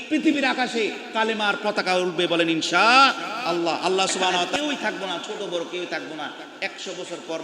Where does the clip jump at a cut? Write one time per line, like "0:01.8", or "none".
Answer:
0:04.5